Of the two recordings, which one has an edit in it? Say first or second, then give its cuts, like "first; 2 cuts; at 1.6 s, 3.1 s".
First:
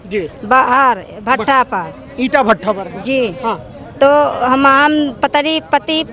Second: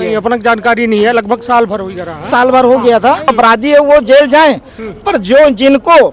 second; 1 cut; at 3.3 s